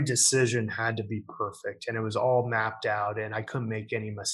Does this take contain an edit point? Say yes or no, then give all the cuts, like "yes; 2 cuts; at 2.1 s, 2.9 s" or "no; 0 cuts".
no; 0 cuts